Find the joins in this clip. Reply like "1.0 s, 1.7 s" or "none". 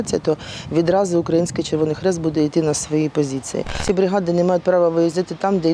3.8 s